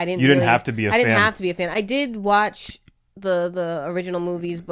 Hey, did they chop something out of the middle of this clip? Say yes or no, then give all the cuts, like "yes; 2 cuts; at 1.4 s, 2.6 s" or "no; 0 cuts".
no; 0 cuts